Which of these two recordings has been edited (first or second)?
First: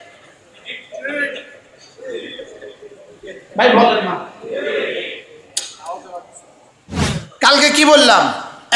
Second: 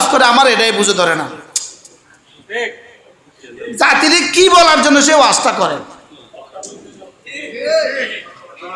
first